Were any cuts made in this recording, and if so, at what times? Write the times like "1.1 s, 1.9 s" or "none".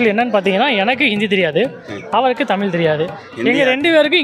none